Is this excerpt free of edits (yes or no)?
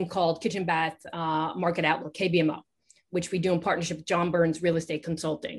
yes